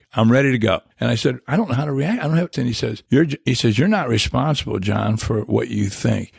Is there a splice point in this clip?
yes; 2 cuts; at 0.9 s, 2.6 s

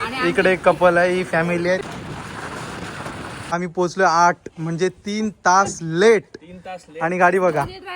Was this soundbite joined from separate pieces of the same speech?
yes; 2 cuts; at 1.8 s, 3.6 s

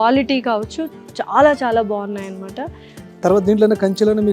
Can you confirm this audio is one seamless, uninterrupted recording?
yes; 0 cuts

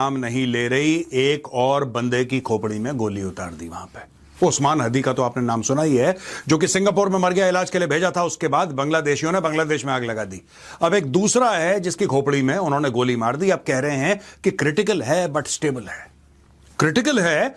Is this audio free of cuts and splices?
yes; 0 cuts

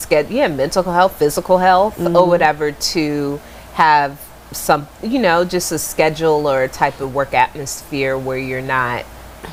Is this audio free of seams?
yes; 0 cuts

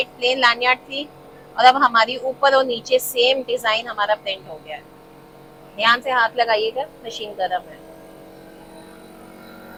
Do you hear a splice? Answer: no; 0 cuts

